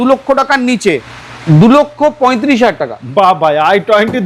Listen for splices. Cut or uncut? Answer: cut